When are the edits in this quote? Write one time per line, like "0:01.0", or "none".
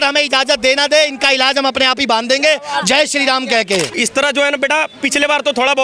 0:03.9